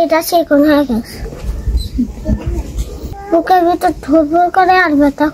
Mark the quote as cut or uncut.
uncut